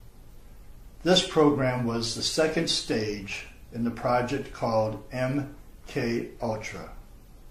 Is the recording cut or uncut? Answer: uncut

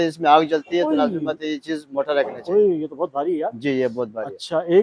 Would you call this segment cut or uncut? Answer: uncut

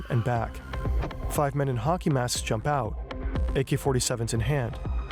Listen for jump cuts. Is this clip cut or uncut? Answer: uncut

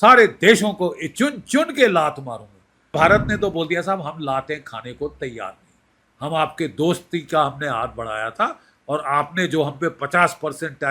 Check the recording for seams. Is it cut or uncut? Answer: cut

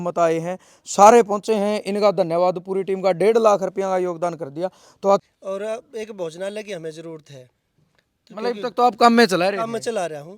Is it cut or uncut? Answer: cut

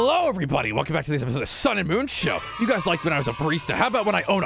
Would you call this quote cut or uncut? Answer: uncut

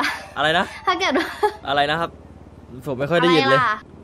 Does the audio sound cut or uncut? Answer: cut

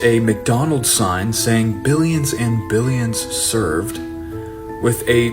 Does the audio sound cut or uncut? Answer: uncut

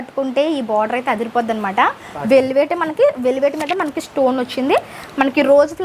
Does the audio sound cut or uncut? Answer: uncut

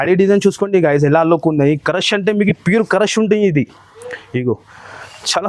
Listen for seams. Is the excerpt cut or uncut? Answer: uncut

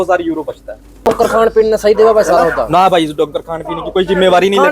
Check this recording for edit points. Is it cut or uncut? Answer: cut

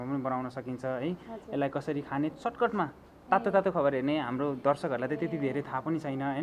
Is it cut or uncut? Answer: uncut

